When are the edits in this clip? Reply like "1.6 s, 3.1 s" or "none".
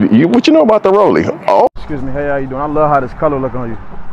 1.7 s